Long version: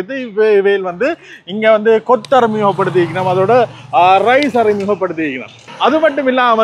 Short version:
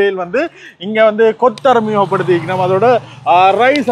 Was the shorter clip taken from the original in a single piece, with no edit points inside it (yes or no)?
yes